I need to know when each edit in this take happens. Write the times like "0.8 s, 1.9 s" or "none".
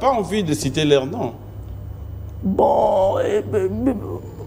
none